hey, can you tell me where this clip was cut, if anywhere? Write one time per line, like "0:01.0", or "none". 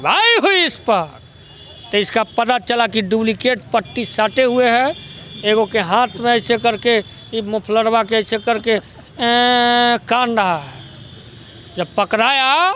none